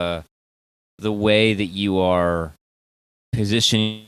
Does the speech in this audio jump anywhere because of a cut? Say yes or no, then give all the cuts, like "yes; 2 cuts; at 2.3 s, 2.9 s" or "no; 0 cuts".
no; 0 cuts